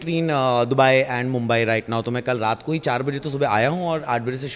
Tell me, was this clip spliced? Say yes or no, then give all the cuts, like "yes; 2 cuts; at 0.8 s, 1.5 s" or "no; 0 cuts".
no; 0 cuts